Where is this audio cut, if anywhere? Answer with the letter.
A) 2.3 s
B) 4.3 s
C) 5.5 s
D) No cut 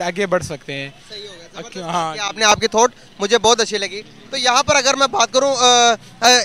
D